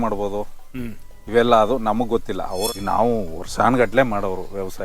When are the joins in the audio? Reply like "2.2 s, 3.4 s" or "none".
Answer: 2.6 s